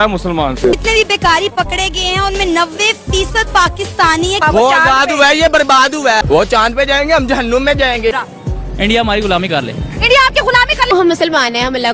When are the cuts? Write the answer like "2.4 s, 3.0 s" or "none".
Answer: 0.8 s, 4.4 s, 6.2 s, 8.1 s, 10.9 s